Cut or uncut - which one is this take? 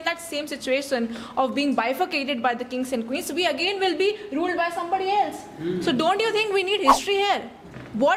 uncut